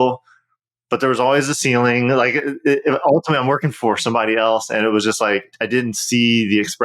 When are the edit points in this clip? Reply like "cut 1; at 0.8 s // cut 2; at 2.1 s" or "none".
cut 1; at 5.5 s